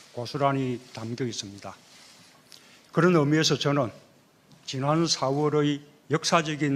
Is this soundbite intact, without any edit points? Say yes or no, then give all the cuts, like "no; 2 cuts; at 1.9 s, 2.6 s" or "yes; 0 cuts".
yes; 0 cuts